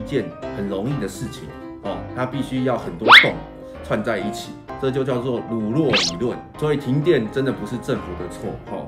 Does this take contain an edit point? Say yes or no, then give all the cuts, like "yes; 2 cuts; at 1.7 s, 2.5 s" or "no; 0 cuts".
yes; 1 cut; at 4.7 s